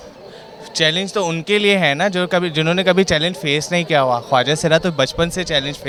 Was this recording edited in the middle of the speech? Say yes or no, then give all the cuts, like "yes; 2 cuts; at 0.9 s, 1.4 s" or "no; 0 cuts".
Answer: no; 0 cuts